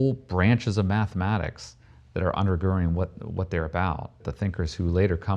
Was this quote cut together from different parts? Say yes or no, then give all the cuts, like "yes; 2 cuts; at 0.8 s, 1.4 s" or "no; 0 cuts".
yes; 1 cut; at 4.1 s